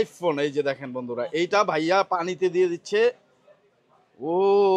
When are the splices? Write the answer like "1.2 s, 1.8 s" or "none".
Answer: none